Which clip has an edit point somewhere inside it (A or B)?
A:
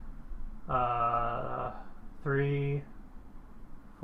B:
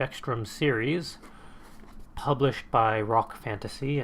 B